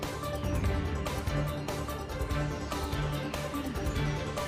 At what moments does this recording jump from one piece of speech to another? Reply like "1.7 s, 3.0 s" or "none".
1.7 s, 3.2 s